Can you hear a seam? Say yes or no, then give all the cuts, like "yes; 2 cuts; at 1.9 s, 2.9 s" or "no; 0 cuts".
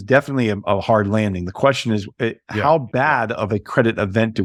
no; 0 cuts